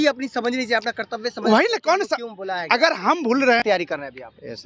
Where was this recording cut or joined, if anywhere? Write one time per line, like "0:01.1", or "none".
0:03.6